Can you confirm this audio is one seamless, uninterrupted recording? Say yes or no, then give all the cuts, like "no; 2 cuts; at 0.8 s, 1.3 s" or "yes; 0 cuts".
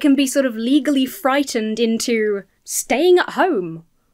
yes; 0 cuts